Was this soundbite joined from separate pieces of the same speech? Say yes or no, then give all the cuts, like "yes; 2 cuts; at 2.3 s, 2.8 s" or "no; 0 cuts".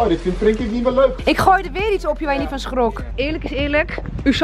yes; 2 cuts; at 1.2 s, 3.1 s